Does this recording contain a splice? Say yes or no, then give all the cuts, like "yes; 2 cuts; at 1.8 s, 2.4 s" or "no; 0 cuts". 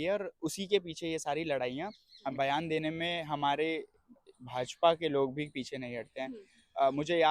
yes; 1 cut; at 2.3 s